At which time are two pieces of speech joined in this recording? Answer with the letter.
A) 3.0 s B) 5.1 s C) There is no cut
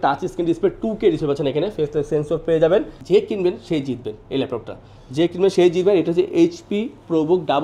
A